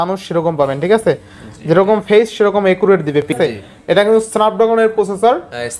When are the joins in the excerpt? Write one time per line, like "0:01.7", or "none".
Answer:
0:03.3